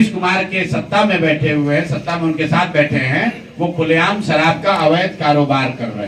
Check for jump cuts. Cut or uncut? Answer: uncut